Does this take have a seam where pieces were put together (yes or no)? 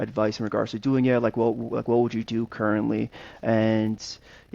no